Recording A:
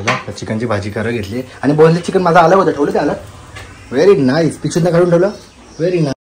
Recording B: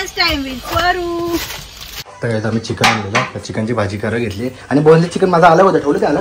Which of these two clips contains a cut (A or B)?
B